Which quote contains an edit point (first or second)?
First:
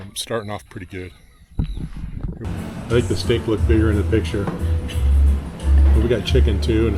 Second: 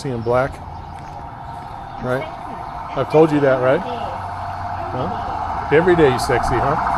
first